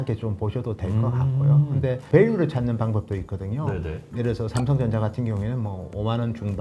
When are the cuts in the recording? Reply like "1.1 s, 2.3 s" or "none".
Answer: 2.0 s, 4.0 s